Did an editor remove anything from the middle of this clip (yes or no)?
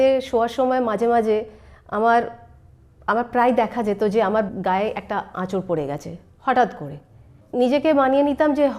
yes